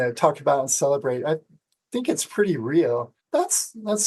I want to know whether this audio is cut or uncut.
cut